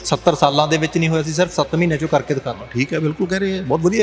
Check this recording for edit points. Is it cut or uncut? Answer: uncut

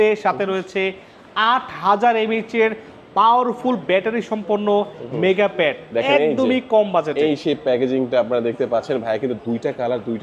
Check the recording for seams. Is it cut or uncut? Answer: uncut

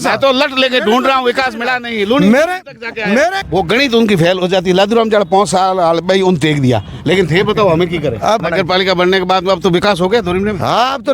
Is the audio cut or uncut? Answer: cut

